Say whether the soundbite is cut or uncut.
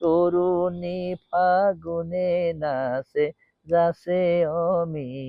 uncut